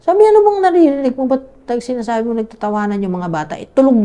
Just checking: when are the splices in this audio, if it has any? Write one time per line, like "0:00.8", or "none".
none